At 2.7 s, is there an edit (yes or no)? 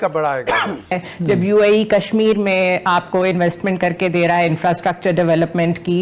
no